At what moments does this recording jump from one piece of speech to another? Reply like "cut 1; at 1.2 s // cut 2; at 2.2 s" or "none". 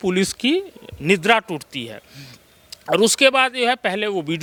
none